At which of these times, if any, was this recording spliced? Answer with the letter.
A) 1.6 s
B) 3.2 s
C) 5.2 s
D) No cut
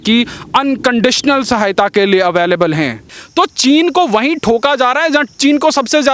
B